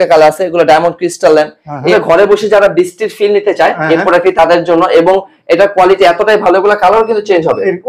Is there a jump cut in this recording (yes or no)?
yes